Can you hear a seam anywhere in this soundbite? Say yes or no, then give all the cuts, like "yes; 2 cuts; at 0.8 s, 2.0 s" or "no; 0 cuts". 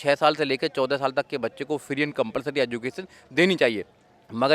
no; 0 cuts